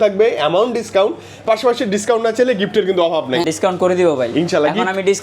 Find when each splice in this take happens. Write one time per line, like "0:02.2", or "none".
0:03.4